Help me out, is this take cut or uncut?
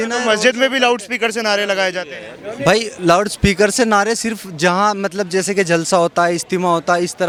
uncut